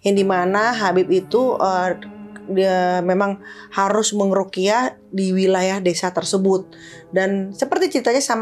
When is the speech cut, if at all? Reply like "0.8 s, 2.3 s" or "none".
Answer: none